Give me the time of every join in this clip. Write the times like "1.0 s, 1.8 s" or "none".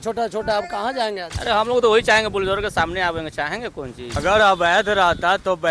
1.3 s, 4.2 s

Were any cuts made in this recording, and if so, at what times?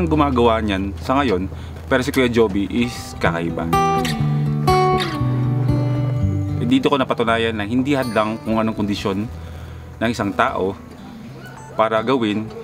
none

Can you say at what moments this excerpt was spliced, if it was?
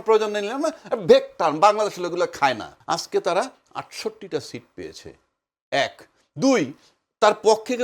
2.7 s

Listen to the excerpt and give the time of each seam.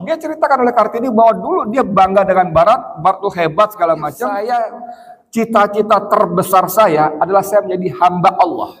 4.2 s

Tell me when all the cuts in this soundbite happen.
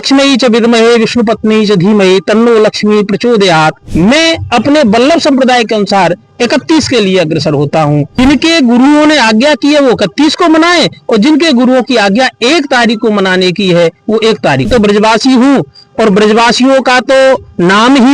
3.8 s, 8.1 s, 14.7 s

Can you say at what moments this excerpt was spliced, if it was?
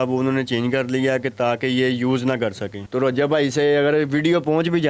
2.7 s

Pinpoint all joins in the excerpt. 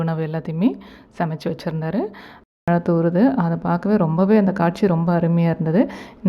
2.7 s

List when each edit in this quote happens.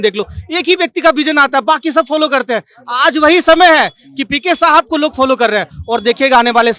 none

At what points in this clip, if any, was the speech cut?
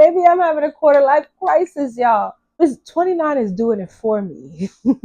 2.6 s

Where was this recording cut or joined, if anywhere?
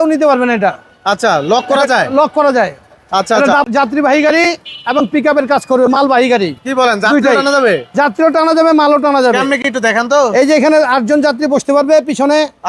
3.6 s

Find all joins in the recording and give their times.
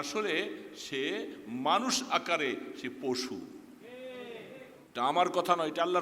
4.8 s

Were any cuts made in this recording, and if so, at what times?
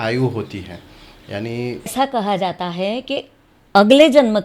1.9 s

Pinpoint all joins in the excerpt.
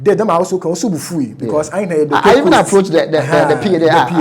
none

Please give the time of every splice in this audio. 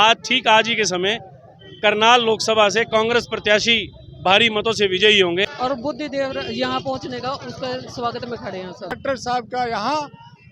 5.5 s, 9.0 s

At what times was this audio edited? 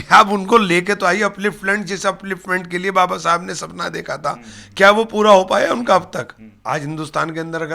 6.4 s

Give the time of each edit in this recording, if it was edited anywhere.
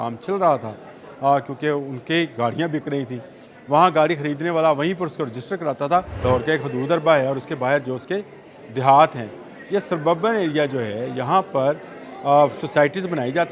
6.2 s

